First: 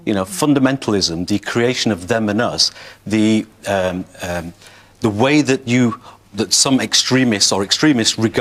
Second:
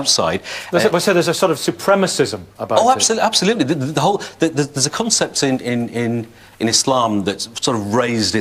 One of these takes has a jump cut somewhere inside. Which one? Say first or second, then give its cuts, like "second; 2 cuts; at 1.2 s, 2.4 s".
second; 1 cut; at 7.2 s